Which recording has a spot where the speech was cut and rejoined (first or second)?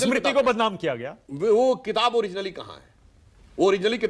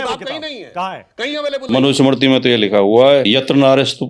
second